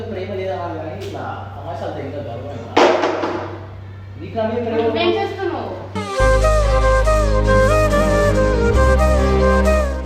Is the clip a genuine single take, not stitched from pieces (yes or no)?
yes